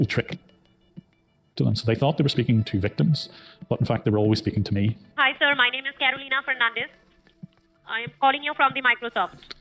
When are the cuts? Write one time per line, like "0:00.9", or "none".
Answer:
0:01.6